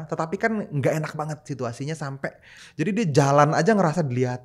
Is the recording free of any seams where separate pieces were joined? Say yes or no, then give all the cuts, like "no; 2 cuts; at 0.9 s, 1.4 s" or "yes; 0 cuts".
no; 1 cut; at 2.6 s